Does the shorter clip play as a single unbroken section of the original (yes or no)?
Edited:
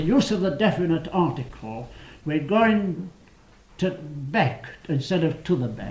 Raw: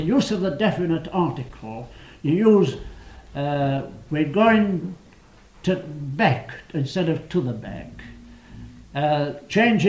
no